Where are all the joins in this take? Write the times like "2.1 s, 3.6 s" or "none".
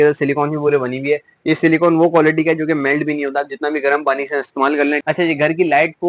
5.0 s